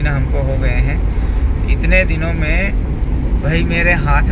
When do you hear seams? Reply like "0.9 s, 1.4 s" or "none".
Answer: none